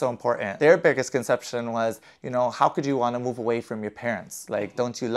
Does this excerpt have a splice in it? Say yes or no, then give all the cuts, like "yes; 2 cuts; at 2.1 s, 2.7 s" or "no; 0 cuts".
no; 0 cuts